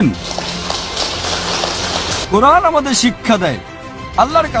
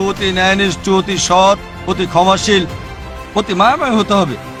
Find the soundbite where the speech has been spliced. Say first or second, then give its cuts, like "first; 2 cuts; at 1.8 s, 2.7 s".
first; 1 cut; at 2.2 s